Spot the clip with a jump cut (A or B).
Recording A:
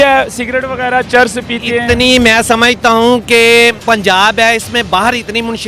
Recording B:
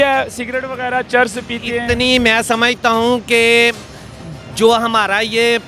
A